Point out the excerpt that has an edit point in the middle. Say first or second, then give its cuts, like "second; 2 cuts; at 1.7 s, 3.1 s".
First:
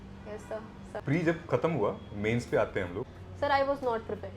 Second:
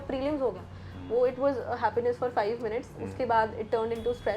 first; 2 cuts; at 1.0 s, 3.2 s